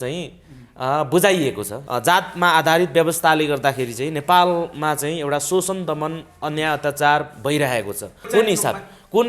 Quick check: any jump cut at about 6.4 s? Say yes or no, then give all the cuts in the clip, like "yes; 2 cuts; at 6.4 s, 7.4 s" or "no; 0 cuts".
no; 2 cuts; at 1.7 s, 8.2 s